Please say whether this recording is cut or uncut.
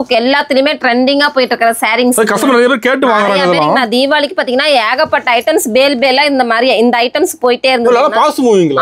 uncut